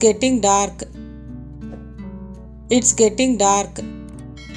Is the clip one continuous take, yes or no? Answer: no